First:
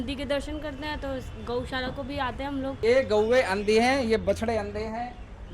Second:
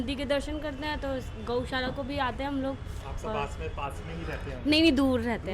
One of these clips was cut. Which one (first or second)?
first